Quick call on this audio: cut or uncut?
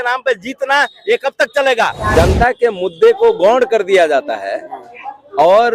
cut